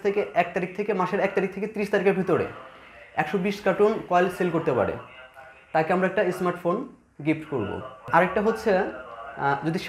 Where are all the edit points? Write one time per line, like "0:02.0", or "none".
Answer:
0:08.0

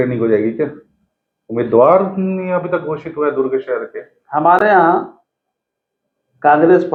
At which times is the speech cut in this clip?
none

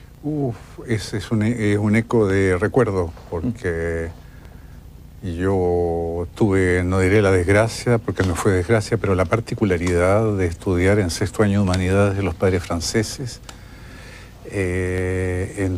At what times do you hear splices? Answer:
none

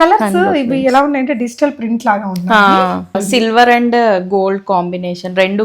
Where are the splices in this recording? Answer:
0:03.2

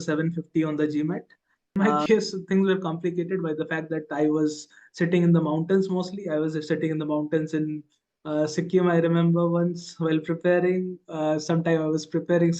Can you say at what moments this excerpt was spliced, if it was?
0:01.8

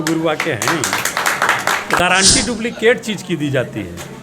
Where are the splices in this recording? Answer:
0:02.0

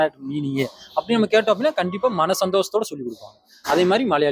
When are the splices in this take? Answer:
none

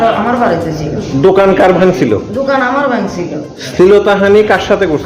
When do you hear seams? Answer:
none

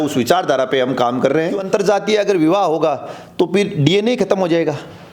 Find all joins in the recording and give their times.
0:01.6

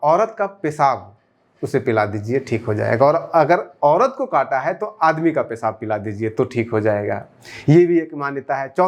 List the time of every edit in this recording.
none

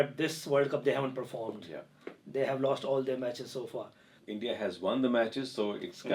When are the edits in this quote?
0:04.1

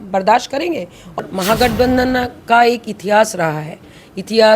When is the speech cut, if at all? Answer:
0:01.2

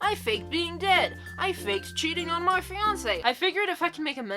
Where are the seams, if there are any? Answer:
0:03.2

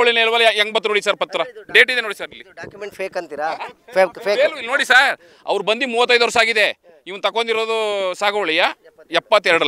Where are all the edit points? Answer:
none

